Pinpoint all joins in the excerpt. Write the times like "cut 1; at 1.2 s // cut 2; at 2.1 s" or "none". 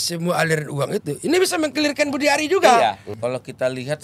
cut 1; at 3.1 s